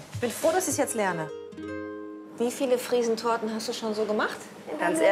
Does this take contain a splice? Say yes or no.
no